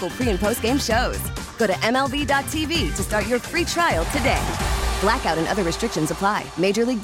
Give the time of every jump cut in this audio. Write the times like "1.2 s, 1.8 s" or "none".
none

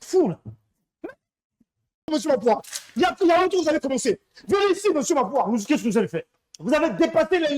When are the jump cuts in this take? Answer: 2.1 s

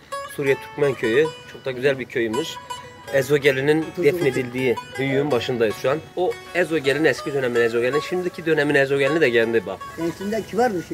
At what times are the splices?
3.9 s, 6.1 s, 9.8 s

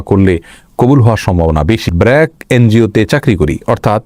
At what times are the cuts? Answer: 1.9 s

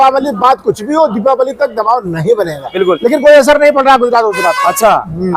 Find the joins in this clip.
2.7 s

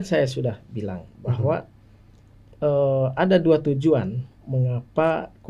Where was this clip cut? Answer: none

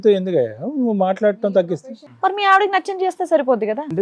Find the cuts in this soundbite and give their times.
1.8 s

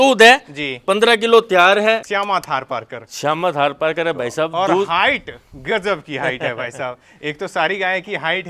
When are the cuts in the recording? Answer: 2.0 s

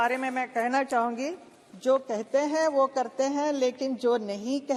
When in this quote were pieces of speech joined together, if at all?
none

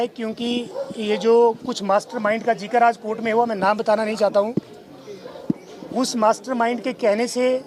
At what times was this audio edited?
none

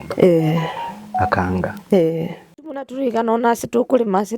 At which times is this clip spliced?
2.9 s

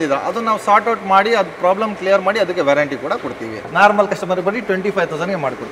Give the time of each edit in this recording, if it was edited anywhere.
3.6 s

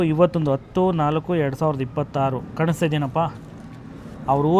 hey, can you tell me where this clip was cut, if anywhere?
none

